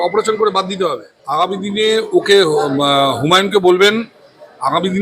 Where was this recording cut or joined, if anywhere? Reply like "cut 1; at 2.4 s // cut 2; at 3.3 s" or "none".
cut 1; at 1.0 s